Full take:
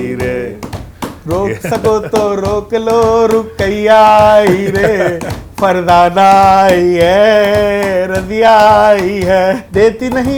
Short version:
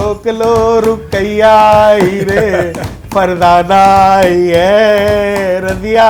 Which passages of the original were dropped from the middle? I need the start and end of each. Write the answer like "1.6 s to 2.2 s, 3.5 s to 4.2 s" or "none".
none